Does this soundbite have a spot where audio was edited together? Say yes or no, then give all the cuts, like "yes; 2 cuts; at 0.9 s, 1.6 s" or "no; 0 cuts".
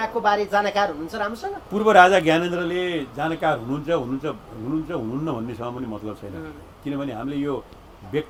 no; 0 cuts